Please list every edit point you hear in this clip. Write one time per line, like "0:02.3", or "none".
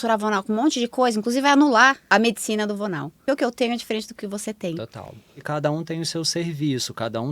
0:02.1
0:03.2
0:05.4